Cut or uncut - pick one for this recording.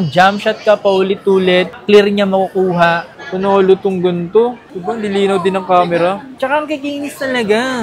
cut